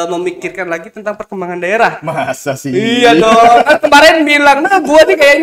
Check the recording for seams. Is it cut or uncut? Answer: uncut